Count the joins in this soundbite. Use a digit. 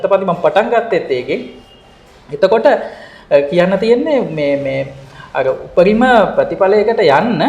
0